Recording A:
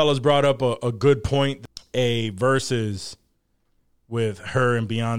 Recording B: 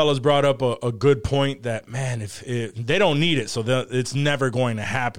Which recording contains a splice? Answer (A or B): A